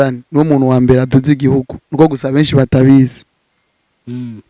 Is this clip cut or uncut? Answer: uncut